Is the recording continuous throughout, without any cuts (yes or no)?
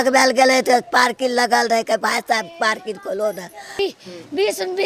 no